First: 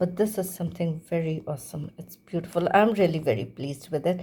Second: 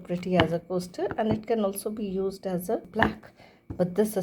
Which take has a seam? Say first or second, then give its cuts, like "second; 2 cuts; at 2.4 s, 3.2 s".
second; 1 cut; at 2.9 s